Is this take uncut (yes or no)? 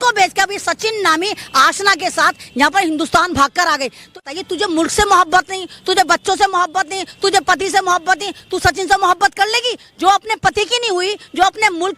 no